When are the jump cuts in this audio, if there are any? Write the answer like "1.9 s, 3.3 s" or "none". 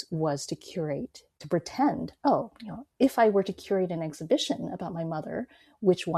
1.4 s